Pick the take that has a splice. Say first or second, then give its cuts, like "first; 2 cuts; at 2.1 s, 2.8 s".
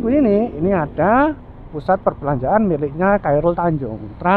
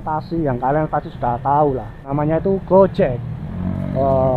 second; 1 cut; at 2.1 s